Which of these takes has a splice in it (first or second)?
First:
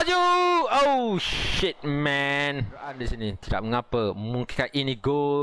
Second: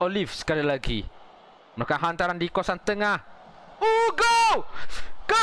first